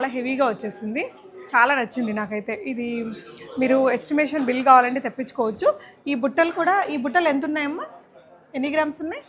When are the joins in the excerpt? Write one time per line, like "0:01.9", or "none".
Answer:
none